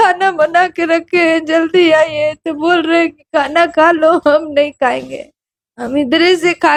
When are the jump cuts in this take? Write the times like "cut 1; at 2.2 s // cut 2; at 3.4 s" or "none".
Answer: none